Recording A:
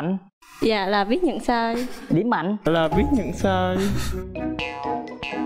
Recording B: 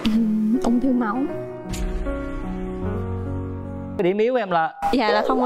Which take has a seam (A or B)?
B